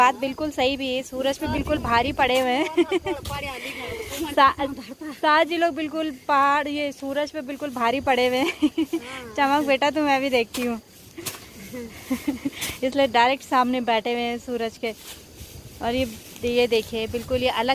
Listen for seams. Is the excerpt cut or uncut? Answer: uncut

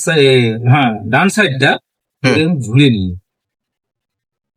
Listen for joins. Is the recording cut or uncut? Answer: uncut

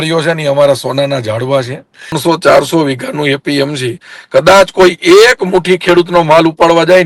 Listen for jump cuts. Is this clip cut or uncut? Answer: cut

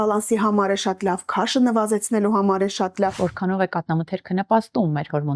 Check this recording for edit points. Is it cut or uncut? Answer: cut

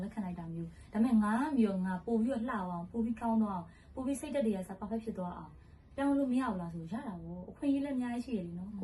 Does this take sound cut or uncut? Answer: uncut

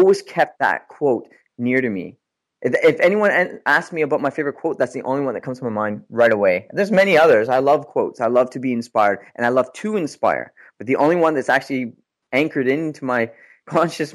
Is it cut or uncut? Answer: uncut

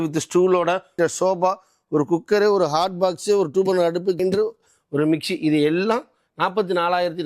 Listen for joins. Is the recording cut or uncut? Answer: uncut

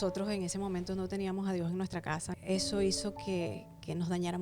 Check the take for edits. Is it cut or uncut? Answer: cut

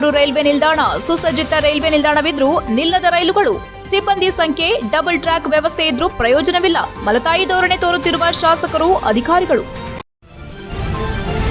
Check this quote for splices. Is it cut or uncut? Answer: cut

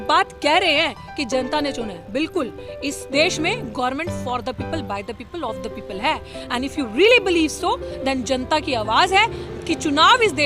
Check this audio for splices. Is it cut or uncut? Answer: uncut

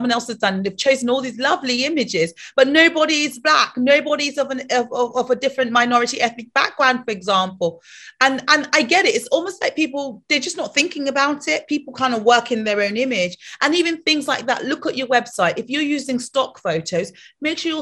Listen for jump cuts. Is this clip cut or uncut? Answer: uncut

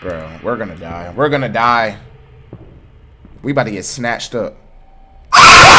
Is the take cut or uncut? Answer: uncut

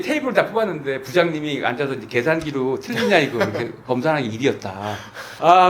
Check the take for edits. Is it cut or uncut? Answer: uncut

